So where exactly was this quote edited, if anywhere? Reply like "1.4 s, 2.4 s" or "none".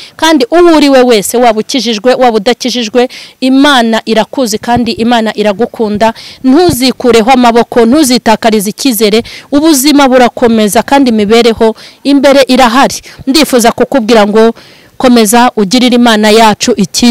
none